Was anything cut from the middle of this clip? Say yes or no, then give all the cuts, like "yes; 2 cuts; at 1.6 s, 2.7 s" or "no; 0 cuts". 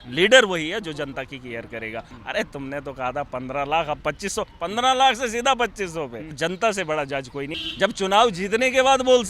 yes; 3 cuts; at 2.1 s, 6.4 s, 7.6 s